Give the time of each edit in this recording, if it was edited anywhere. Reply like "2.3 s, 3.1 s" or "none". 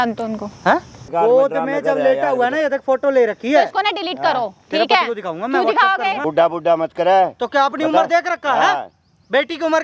1.0 s, 6.2 s